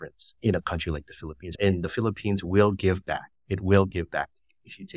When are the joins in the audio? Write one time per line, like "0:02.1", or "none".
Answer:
none